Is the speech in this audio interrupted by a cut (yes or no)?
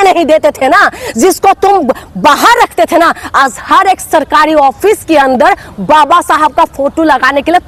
no